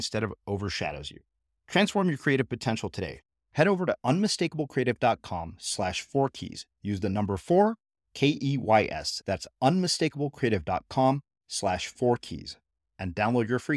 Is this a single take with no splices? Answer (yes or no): yes